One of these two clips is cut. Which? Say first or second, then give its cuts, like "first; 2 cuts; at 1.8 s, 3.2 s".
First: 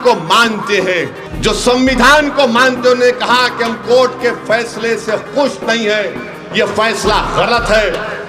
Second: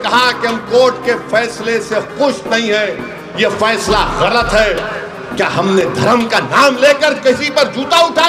first; 1 cut; at 1.2 s